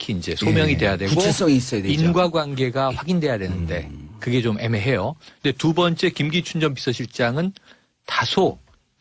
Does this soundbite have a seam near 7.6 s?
no; 1 cut; at 4.2 s

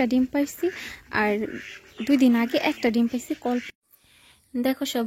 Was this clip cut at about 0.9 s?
no; 1 cut; at 3.7 s

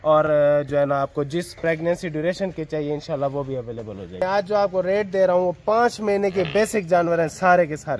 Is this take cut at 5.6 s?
no; 1 cut; at 4.2 s

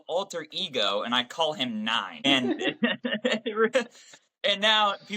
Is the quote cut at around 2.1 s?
yes; 1 cut; at 2.1 s

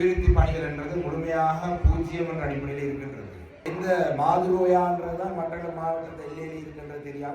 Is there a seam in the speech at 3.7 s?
yes; 1 cut; at 3.7 s

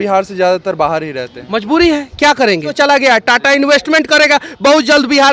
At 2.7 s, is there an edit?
yes; 1 cut; at 2.7 s

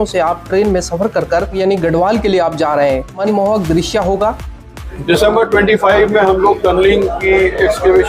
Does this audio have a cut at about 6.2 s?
no; 3 cuts; at 1.6 s, 3.2 s, 4.9 s

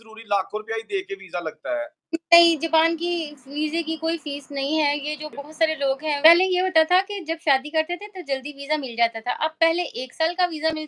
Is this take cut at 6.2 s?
yes; 1 cut; at 6.2 s

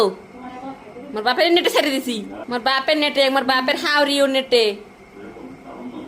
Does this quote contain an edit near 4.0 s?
no; 1 cut; at 2.3 s

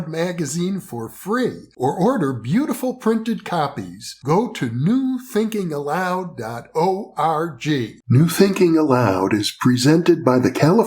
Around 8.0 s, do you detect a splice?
yes; 1 cut; at 8.0 s

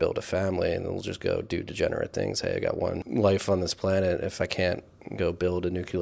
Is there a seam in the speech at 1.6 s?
no; 1 cut; at 3.0 s

